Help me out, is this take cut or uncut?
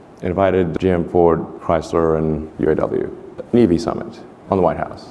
cut